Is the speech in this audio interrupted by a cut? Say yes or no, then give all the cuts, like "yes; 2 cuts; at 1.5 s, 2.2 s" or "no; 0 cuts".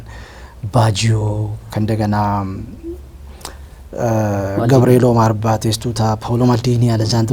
no; 0 cuts